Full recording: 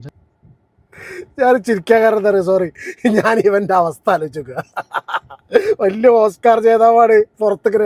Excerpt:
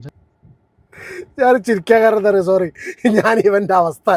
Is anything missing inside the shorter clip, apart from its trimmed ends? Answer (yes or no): no